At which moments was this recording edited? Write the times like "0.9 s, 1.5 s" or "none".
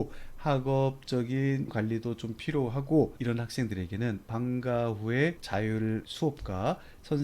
5.4 s